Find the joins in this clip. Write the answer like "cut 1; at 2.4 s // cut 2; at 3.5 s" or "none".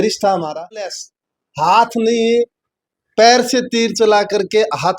cut 1; at 0.9 s